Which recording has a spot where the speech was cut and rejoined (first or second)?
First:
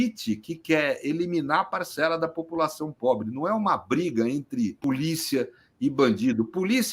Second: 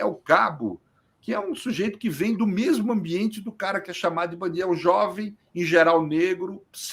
first